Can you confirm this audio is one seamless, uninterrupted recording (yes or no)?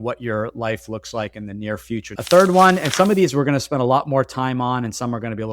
no